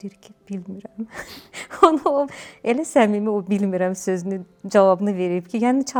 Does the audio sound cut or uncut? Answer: uncut